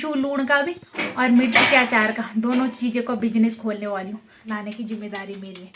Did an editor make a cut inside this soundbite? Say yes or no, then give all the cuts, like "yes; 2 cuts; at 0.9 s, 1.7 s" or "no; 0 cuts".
yes; 1 cut; at 4.5 s